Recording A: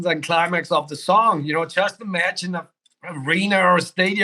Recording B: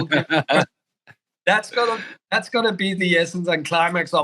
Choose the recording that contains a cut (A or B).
B